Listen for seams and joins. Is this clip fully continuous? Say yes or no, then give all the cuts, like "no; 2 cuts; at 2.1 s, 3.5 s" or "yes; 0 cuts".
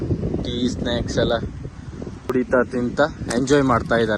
no; 1 cut; at 2.3 s